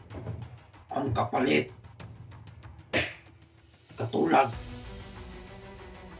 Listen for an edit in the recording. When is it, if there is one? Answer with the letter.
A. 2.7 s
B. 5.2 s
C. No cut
B